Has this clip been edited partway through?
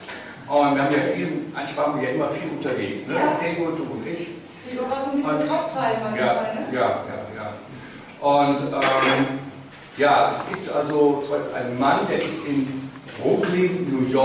no; 0 cuts

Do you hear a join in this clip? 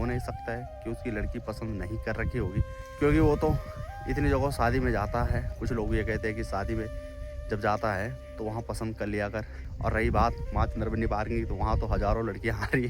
yes; 3 cuts; at 2.8 s, 5.5 s, 9.6 s

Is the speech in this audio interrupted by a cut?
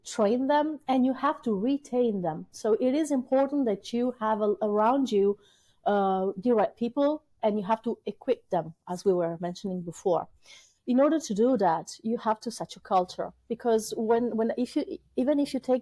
no; 0 cuts

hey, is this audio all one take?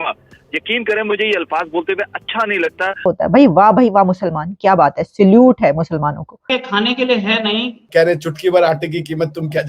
no; 2 cuts; at 3.1 s, 6.5 s

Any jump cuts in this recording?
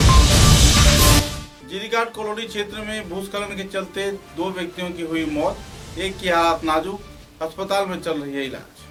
no; 0 cuts

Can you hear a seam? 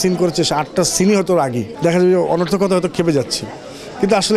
yes; 1 cut; at 1.7 s

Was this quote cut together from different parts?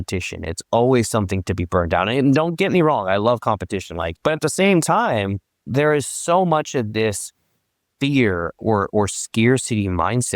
yes; 2 cuts; at 4.1 s, 5.5 s

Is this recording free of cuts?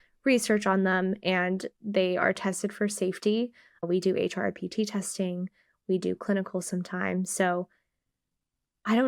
yes; 0 cuts

